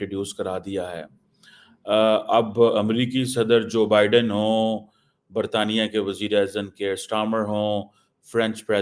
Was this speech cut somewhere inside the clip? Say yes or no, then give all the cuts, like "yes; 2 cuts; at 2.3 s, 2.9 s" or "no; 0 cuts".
no; 0 cuts